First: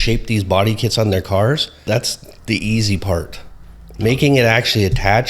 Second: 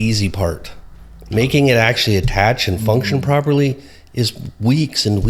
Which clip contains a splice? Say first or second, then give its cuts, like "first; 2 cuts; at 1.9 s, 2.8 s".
first; 1 cut; at 1.7 s